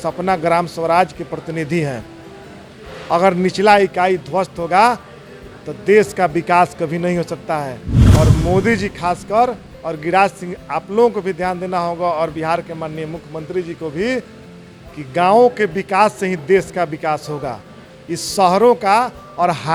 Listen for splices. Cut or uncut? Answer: uncut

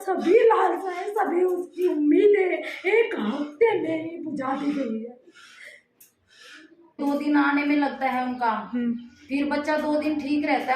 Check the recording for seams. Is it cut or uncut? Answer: cut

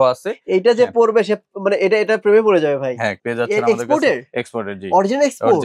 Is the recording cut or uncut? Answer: cut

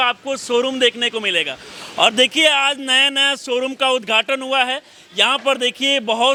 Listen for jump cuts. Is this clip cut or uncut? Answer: uncut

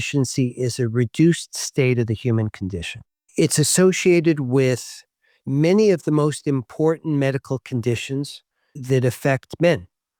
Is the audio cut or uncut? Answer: uncut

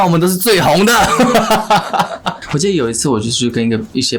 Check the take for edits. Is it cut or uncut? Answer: cut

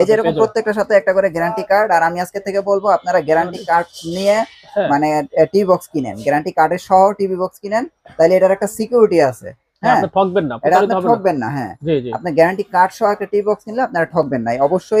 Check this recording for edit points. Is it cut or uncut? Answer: uncut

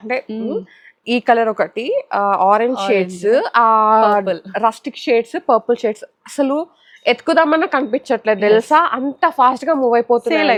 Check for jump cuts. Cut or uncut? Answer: uncut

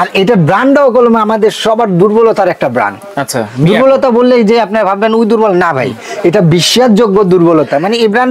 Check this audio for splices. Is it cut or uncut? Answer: uncut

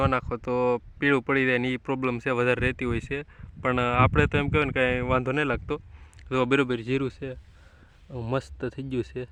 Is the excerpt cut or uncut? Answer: uncut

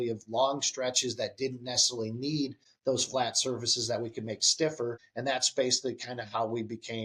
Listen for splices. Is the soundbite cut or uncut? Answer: cut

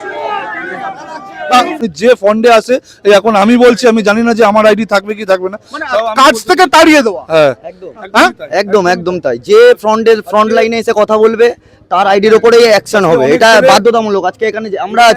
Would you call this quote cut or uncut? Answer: cut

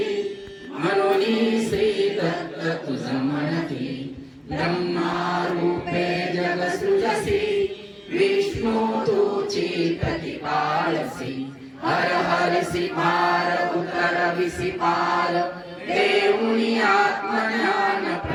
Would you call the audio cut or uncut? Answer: uncut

